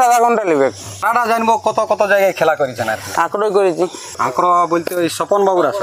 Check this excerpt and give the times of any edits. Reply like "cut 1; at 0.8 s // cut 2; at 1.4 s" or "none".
cut 1; at 0.9 s // cut 2; at 4.1 s